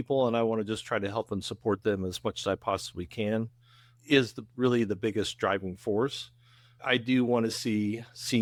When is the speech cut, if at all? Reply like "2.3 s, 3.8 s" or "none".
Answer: none